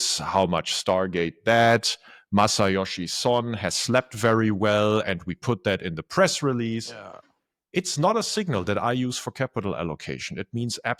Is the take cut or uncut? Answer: uncut